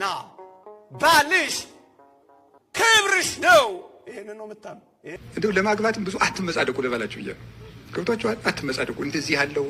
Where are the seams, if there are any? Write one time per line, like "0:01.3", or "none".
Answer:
0:05.2